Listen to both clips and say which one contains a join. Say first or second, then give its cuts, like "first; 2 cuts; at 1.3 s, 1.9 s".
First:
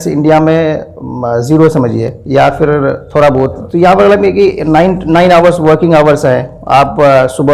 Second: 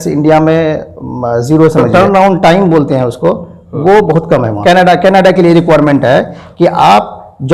second; 2 cuts; at 1.9 s, 4.6 s